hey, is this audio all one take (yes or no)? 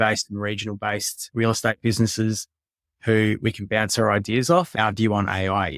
no